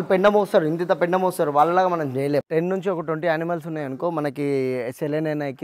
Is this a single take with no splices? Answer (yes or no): no